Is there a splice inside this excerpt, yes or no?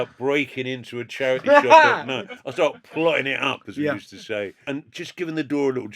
yes